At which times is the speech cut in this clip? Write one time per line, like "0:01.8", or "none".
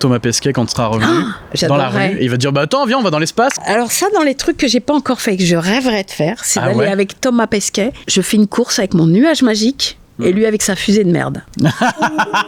0:03.6
0:08.0